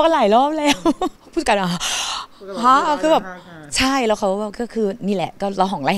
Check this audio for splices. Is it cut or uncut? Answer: cut